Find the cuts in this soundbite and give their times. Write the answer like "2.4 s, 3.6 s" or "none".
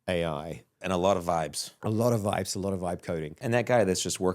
0.8 s, 1.7 s, 3.4 s